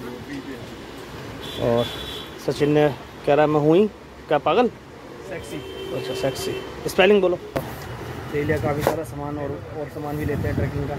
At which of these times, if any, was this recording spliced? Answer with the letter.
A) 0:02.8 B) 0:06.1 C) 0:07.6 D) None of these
C